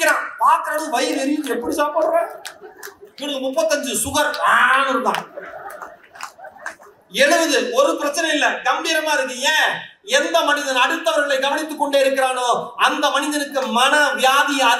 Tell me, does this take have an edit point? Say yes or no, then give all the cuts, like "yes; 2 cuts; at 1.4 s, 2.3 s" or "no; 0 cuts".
no; 0 cuts